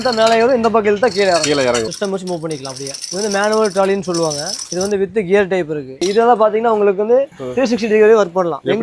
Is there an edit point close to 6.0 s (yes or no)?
yes